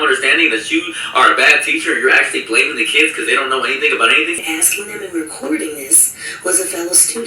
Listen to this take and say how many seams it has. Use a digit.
1